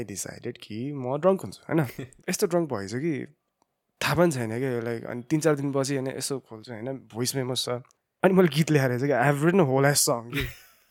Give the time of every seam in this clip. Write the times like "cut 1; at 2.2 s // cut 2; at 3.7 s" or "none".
cut 1; at 2.1 s // cut 2; at 8.0 s